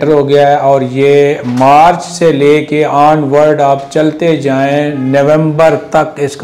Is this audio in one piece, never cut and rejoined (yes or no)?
yes